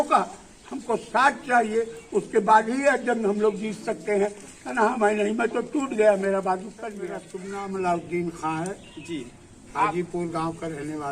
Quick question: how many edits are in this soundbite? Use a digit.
1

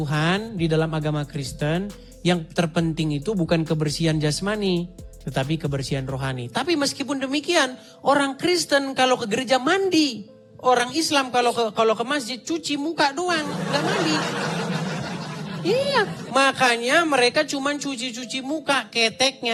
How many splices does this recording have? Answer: 0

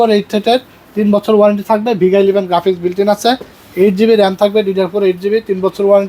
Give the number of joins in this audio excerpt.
0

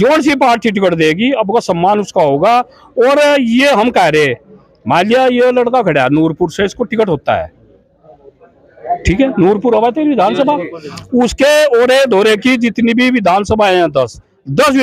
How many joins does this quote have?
0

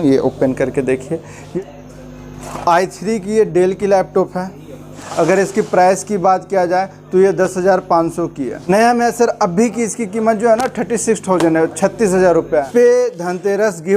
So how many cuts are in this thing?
4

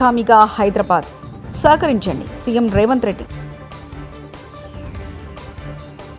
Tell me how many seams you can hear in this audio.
0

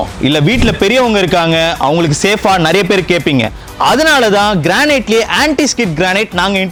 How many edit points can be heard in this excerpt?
0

